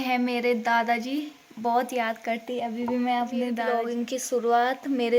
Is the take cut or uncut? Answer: cut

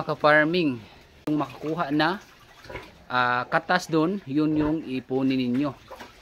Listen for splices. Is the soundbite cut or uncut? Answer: cut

